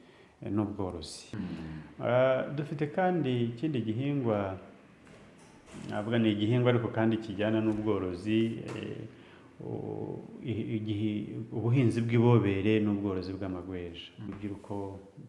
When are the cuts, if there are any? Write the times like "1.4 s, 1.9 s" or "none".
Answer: 1.2 s, 14.3 s